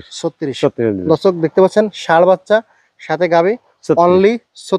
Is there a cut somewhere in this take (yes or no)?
no